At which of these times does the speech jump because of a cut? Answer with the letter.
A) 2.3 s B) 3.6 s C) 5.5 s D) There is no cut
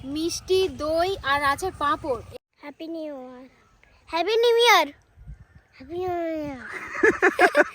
A